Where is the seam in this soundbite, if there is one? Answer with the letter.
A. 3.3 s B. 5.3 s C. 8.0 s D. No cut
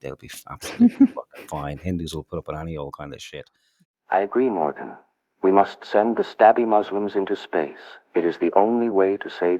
D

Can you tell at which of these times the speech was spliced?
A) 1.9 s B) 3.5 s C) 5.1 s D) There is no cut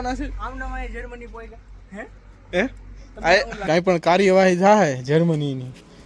B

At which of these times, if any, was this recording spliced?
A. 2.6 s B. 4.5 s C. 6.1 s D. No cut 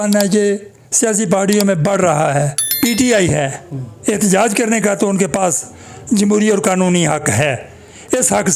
A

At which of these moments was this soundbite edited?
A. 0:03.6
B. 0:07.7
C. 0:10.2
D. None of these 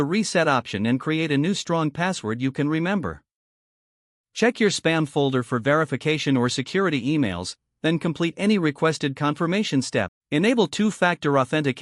C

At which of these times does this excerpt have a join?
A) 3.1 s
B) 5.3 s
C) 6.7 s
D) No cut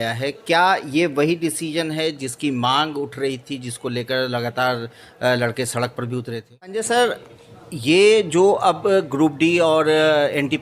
C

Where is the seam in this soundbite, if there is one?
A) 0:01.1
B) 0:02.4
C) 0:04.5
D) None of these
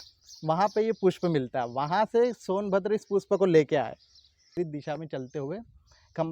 C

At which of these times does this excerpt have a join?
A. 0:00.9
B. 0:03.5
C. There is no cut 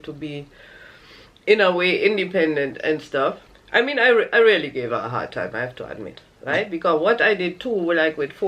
B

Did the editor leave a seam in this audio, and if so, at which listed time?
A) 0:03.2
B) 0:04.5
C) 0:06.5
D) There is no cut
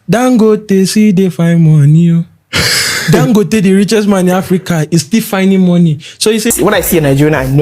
C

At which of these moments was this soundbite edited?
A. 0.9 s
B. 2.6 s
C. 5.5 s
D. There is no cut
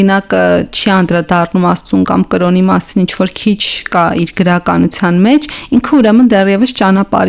D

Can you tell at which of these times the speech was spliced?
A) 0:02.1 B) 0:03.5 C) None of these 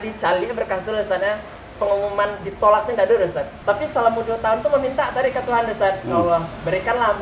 B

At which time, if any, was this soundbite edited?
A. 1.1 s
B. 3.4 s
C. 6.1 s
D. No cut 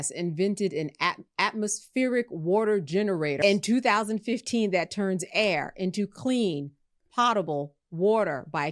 B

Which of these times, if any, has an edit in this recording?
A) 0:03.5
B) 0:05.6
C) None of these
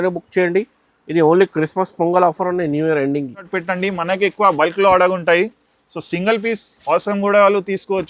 A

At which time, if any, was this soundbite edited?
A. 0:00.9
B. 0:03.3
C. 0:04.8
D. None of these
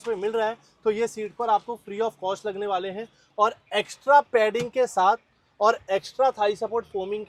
D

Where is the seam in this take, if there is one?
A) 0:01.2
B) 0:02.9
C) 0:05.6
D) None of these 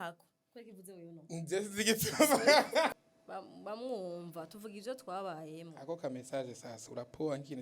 B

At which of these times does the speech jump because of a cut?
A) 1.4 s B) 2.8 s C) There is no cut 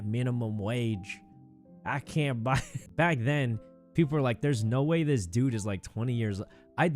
B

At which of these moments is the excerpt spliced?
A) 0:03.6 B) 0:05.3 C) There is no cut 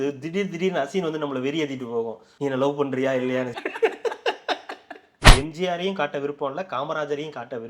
B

